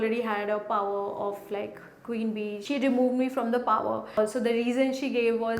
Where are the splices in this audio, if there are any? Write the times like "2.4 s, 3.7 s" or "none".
2.6 s, 4.2 s